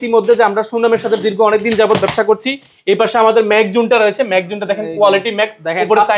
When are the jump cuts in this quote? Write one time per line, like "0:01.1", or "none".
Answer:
none

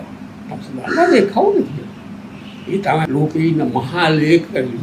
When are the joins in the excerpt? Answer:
0:03.1

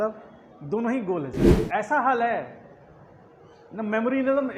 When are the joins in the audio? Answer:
0:01.5

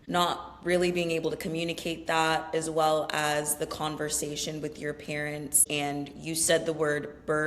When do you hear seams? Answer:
0:05.6

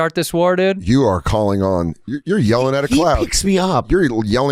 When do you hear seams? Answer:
none

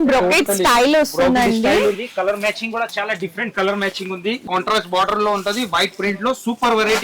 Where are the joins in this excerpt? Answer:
0:04.4

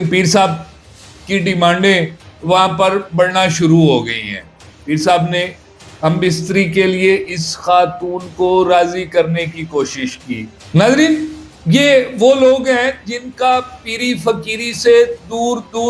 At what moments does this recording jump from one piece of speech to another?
0:10.6

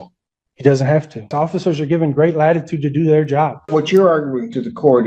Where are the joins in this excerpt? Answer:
0:01.3
0:03.7

